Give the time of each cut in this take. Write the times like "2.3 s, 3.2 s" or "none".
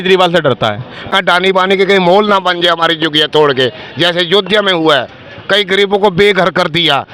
1.1 s